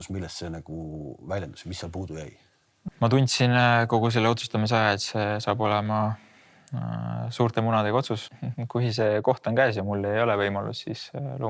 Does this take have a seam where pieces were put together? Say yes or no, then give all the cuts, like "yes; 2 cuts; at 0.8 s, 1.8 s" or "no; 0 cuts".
yes; 2 cuts; at 2.8 s, 8.4 s